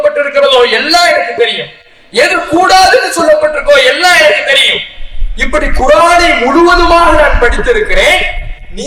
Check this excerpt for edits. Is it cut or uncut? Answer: uncut